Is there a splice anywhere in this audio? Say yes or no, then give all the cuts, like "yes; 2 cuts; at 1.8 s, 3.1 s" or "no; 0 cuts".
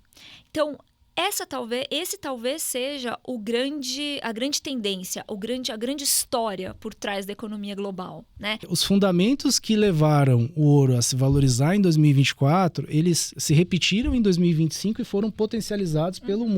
yes; 1 cut; at 8.7 s